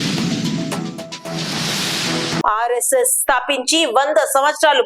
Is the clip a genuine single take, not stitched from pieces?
no; 1 cut; at 2.4 s

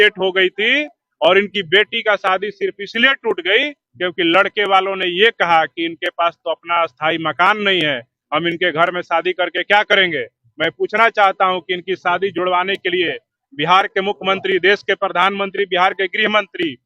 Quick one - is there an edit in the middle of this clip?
no; 0 cuts

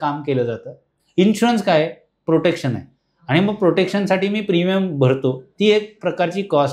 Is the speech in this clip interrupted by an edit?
yes; 1 cut; at 1.0 s

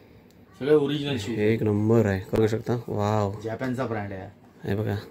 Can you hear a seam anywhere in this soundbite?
yes; 1 cut; at 2.4 s

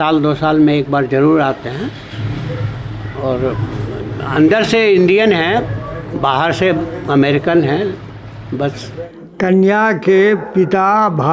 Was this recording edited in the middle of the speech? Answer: yes; 1 cut; at 9.1 s

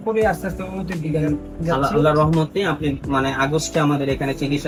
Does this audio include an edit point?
no; 0 cuts

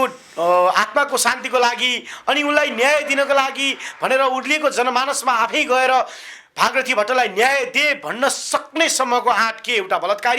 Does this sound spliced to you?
no; 0 cuts

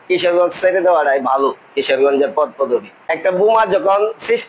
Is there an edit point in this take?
yes; 1 cut; at 3.4 s

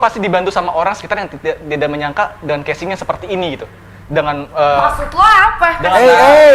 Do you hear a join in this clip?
no; 0 cuts

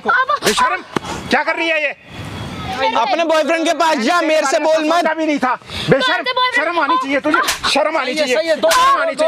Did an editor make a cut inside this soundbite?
yes; 1 cut; at 2.8 s

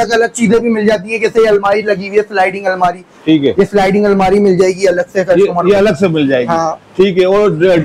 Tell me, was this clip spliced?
no; 0 cuts

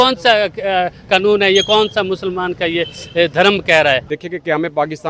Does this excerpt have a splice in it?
yes; 1 cut; at 4.1 s

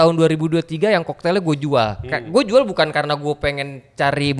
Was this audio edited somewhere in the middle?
no; 0 cuts

